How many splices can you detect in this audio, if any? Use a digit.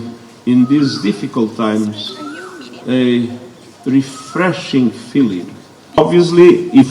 1